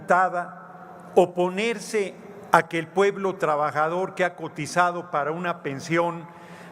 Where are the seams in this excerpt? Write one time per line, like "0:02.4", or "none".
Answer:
none